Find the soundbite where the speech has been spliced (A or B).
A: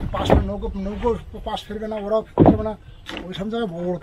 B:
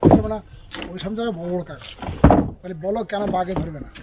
B